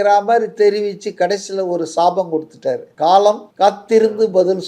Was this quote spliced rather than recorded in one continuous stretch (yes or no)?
yes